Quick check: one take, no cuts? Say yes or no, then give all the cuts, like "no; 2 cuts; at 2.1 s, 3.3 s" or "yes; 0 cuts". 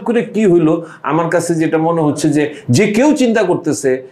yes; 0 cuts